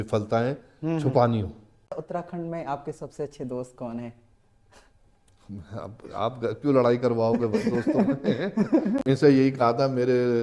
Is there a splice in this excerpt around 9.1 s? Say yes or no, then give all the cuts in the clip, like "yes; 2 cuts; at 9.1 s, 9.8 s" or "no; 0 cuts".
yes; 2 cuts; at 1.9 s, 9.1 s